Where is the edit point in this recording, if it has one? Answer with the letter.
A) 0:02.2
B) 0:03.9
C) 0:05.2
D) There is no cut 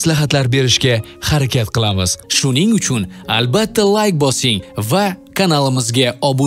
A